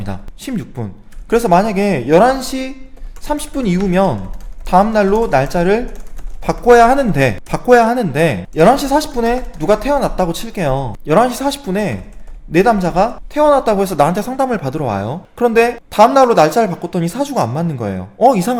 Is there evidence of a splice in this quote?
no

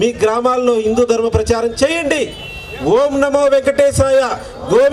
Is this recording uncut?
yes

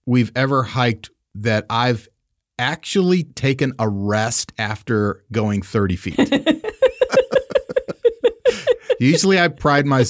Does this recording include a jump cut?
no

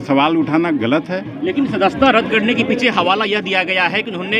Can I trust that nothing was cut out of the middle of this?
yes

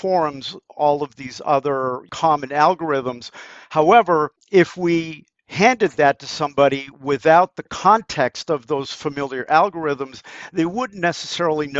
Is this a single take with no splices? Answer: no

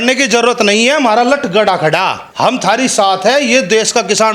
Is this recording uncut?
no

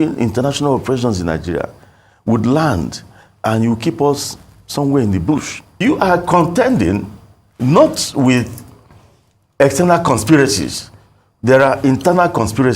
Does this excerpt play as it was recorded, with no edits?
no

